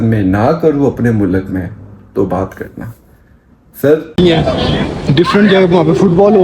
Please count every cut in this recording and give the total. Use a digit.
1